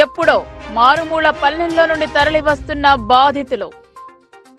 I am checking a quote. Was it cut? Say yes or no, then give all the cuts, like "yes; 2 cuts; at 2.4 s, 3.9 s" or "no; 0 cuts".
no; 0 cuts